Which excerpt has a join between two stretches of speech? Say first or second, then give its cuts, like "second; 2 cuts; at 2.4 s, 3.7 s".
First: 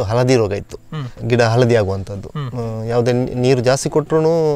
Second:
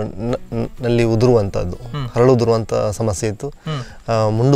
first; 1 cut; at 1.1 s